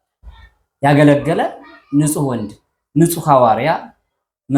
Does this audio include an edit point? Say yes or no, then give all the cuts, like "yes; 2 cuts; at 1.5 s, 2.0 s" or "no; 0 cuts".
no; 0 cuts